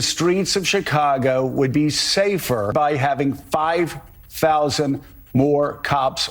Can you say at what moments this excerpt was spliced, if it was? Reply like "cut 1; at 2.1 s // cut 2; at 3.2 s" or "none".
cut 1; at 2.7 s